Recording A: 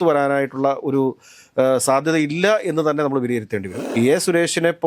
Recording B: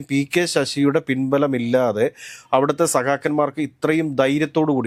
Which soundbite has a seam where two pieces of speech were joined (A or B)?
A